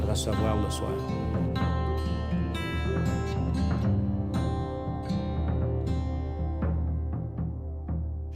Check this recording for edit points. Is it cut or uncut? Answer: uncut